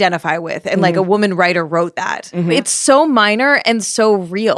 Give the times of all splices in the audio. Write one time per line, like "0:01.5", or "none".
0:02.5